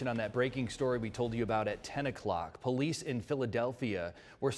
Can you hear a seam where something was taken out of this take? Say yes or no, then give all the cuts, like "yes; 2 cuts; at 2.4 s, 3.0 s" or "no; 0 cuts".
no; 0 cuts